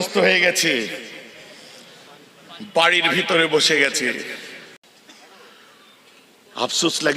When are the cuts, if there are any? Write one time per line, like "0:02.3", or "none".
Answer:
0:04.8